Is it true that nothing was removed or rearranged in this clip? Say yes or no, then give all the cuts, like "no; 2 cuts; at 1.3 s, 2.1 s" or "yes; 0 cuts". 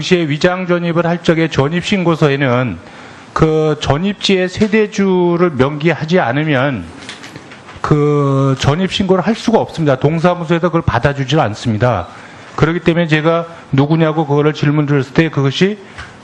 yes; 0 cuts